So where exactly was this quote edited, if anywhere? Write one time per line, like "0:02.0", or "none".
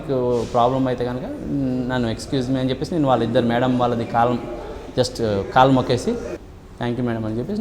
0:06.3